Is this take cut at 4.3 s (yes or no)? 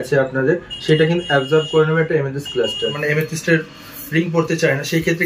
no